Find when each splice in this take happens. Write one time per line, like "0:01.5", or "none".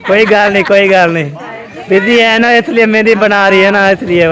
none